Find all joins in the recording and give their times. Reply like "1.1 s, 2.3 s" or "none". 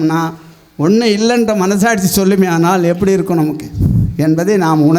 none

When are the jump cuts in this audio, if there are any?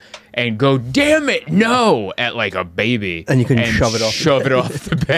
none

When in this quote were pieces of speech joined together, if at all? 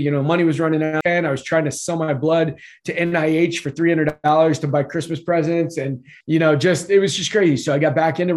1.0 s, 6.1 s

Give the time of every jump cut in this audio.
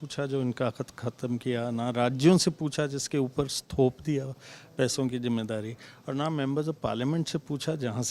none

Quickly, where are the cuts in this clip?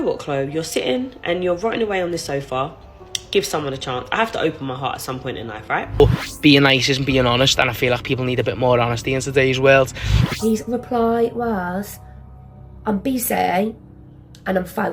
6.0 s, 10.0 s

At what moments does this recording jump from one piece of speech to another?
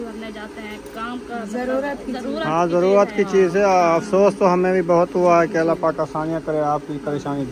none

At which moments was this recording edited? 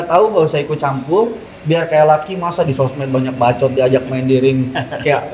1.5 s

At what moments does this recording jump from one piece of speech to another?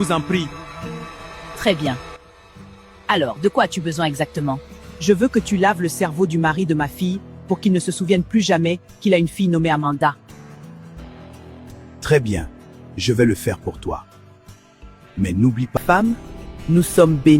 15.8 s

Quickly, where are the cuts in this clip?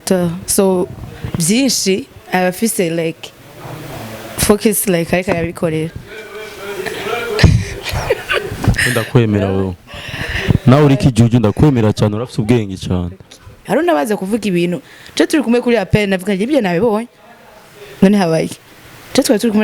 13.6 s

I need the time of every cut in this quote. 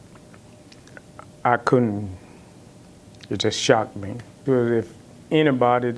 4.3 s

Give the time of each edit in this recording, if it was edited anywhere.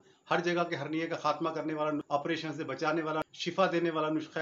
2.1 s, 3.2 s

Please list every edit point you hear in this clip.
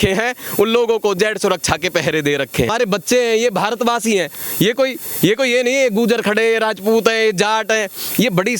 2.7 s

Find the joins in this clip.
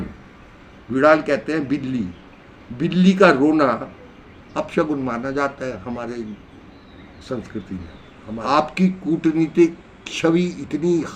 8.4 s

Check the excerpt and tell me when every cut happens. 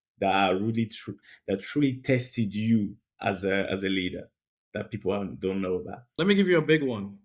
6.0 s

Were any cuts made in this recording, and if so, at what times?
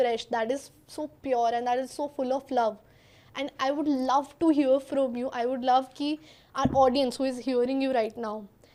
none

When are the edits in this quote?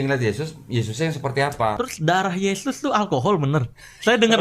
1.8 s

